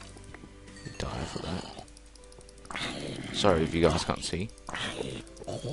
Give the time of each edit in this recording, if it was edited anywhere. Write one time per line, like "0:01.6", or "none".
0:03.4